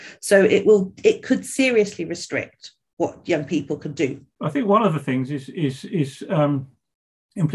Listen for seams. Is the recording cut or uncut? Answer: cut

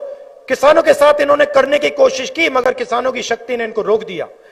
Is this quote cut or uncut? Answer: uncut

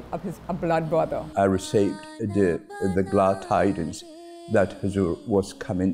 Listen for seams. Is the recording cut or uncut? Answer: cut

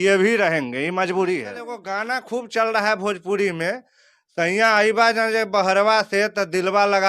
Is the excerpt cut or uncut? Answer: cut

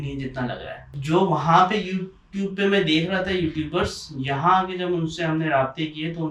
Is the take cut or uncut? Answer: cut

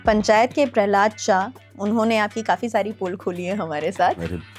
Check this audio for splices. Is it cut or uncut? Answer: uncut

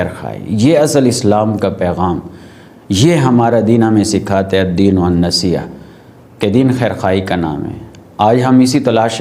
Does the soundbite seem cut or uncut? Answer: uncut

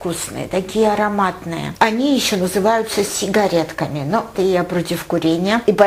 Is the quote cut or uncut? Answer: cut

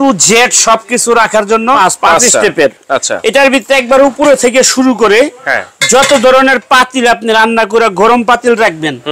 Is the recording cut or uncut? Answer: cut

